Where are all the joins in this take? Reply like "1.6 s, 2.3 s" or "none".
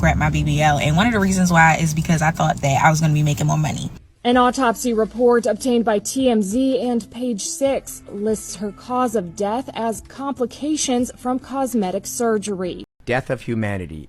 3.9 s, 12.8 s